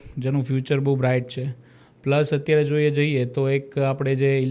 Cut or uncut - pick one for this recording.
uncut